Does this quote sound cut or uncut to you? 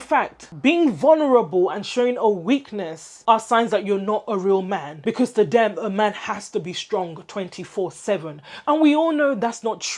uncut